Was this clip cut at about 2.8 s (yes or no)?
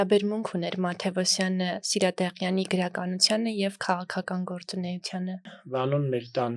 no